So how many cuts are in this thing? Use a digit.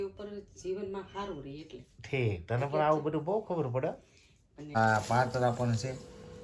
1